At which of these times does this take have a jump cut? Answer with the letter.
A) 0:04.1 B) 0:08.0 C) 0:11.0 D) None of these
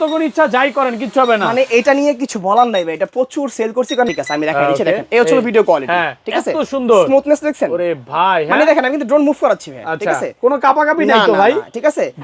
A